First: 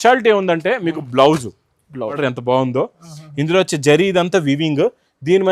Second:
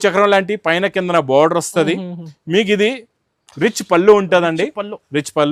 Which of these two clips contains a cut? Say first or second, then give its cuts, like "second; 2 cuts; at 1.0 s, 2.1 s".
first; 1 cut; at 2.2 s